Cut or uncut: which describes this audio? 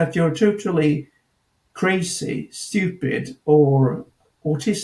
uncut